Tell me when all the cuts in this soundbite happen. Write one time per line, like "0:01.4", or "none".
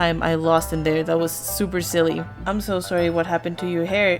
0:02.3